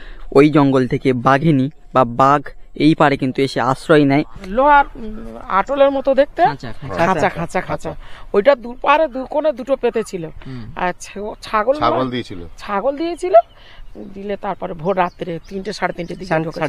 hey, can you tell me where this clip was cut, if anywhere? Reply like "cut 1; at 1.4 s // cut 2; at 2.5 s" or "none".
cut 1; at 4.4 s